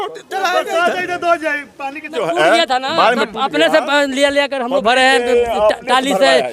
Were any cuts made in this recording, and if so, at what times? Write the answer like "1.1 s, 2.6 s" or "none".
2.1 s